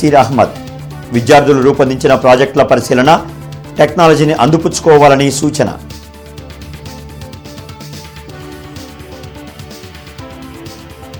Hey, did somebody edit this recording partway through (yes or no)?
no